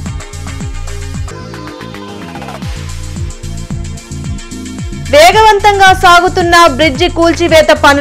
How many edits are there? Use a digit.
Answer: 2